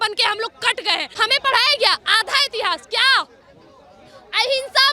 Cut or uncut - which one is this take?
cut